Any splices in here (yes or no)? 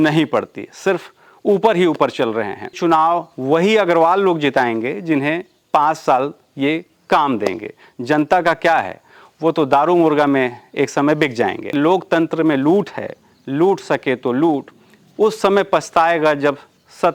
yes